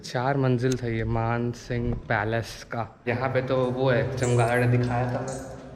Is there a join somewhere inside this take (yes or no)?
yes